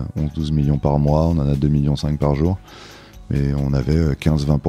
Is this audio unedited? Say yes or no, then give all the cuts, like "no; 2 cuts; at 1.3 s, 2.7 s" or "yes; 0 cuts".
yes; 0 cuts